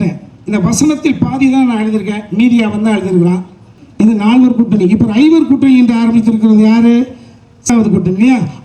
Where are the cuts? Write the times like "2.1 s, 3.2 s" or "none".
3.8 s, 7.7 s